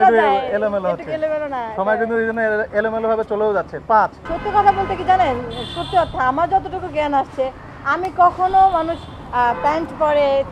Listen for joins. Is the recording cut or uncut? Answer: cut